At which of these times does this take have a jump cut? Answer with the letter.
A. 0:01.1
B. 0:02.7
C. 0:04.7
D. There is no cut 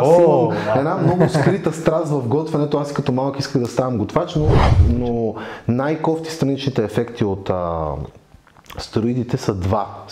C